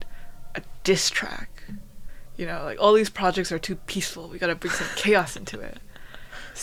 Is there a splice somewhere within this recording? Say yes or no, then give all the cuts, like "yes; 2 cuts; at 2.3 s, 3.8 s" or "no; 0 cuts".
no; 0 cuts